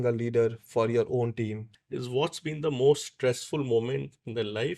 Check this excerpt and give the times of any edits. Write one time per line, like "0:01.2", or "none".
0:01.7

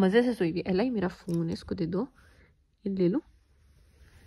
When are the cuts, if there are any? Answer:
none

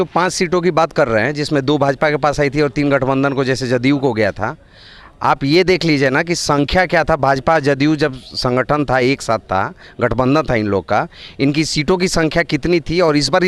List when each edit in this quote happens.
none

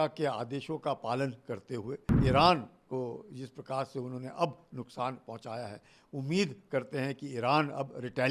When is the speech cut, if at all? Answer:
0:02.1

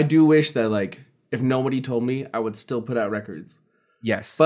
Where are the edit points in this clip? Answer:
none

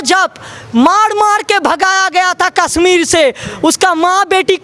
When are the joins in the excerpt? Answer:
none

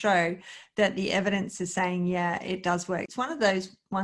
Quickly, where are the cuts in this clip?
0:03.1

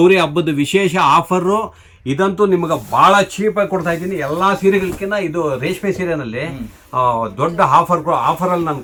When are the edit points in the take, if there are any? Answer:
none

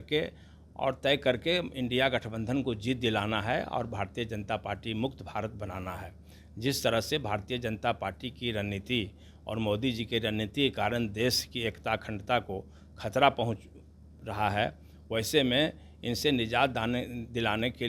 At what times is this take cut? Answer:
none

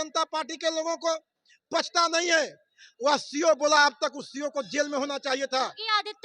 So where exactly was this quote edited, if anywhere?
none

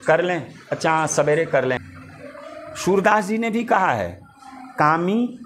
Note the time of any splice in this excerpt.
0:01.8

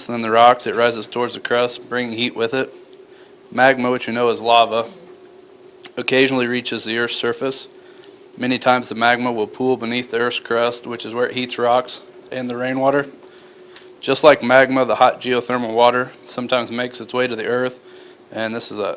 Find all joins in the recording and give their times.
0:12.6

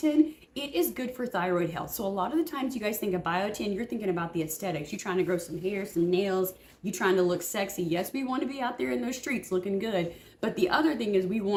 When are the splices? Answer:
none

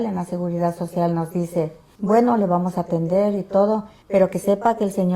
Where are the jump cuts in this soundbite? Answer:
0:01.8
0:03.9

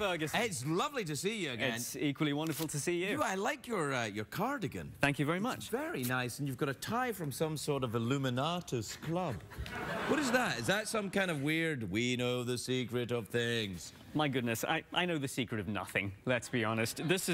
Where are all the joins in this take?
0:06.1

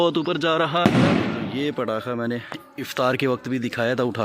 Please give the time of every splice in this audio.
0:01.4

